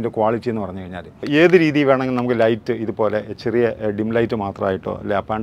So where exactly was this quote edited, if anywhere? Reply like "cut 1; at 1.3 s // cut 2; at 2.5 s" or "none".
cut 1; at 1.2 s